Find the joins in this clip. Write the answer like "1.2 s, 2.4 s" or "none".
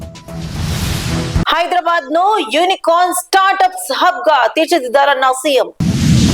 none